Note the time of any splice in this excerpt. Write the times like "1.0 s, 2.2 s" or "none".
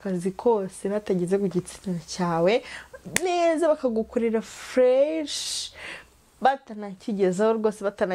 none

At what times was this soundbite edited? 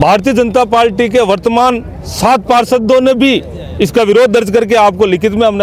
none

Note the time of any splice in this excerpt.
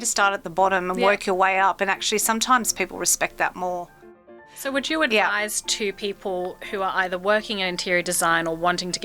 4.3 s

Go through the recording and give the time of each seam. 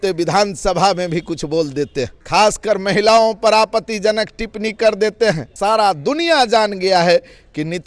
2.2 s, 5.5 s

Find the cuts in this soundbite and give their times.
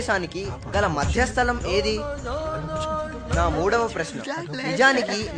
none

